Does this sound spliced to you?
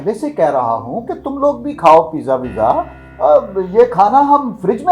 no; 0 cuts

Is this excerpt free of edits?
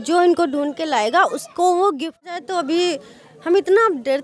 no; 1 cut; at 2.2 s

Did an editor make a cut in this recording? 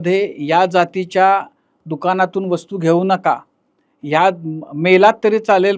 no; 0 cuts

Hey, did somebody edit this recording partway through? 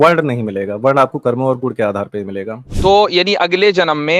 yes; 1 cut; at 2.7 s

